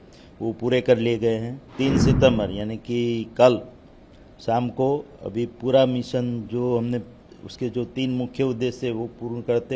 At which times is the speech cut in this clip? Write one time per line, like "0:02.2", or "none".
0:01.6